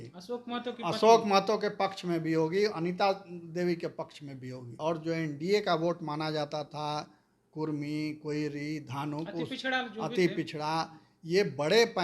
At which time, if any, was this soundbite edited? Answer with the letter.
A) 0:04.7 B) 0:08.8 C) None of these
A